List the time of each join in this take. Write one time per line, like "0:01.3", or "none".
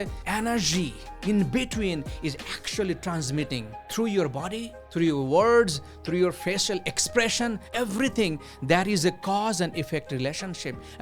0:07.6